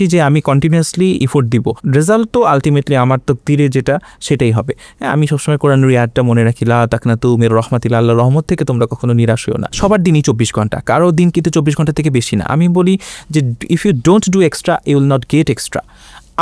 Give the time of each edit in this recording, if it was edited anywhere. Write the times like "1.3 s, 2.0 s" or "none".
1.8 s, 9.7 s